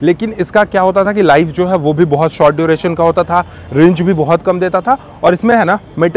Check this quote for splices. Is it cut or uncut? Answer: uncut